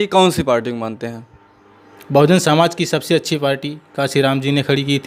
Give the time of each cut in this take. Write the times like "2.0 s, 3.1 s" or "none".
none